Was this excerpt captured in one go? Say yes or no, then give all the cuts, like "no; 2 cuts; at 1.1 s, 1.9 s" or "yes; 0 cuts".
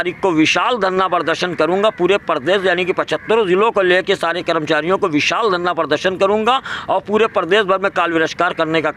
yes; 0 cuts